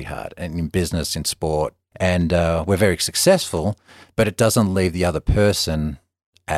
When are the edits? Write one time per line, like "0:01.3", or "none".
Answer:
0:01.8